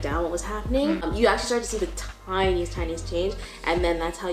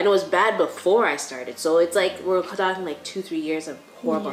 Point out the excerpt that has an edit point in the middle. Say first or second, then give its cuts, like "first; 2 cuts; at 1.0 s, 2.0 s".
first; 1 cut; at 1.1 s